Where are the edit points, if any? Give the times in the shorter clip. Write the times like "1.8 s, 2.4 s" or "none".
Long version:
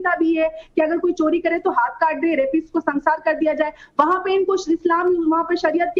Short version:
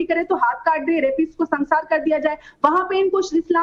none

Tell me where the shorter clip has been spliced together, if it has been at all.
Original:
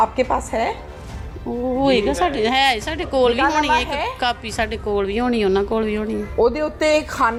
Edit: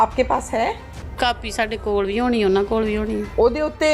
1.1 s

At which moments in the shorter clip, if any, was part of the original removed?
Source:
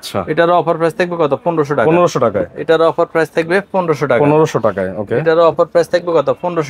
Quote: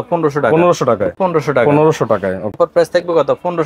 1.1 s, 2.6 s

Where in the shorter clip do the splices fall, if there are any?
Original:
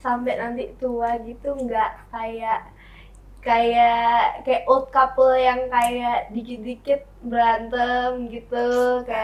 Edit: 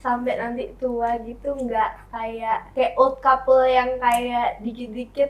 2.7 s

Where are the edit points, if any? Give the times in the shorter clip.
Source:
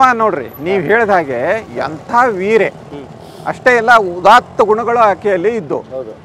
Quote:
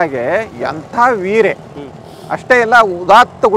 none

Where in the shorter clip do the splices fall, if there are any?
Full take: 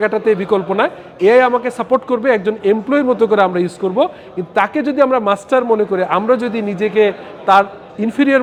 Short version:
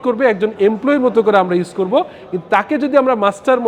none

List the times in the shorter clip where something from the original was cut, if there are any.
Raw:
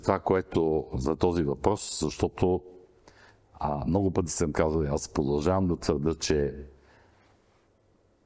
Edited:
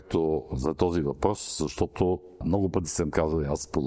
2.4 s

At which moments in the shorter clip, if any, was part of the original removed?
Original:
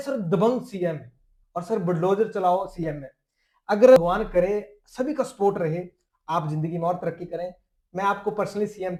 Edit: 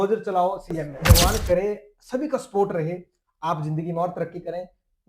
1.2 s

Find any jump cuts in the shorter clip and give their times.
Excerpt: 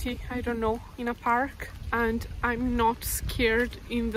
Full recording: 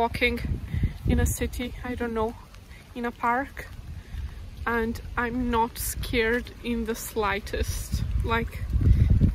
0.9 s, 1.7 s

